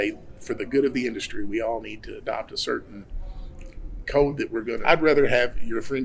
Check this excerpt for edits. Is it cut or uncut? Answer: cut